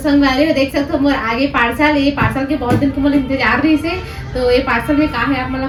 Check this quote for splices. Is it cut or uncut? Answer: uncut